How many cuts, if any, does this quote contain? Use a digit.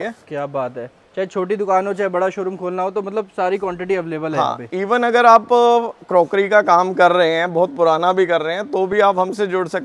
0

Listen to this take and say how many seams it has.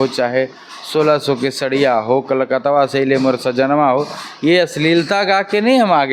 0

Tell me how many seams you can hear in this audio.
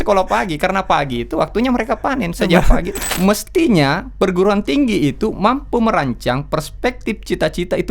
1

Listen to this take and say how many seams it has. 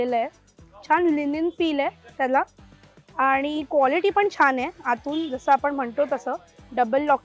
0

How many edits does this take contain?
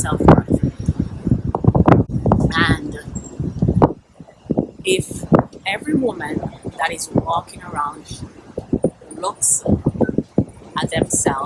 0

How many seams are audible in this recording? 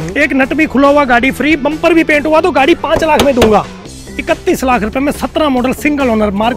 1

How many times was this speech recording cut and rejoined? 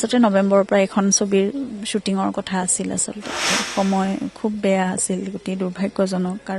1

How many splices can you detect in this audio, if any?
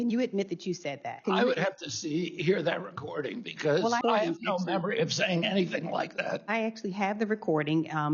3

